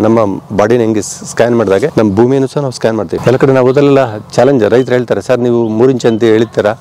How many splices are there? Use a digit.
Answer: 2